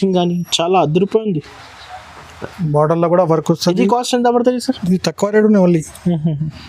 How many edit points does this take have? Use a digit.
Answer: 0